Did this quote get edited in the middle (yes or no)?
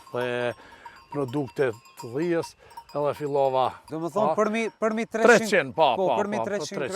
yes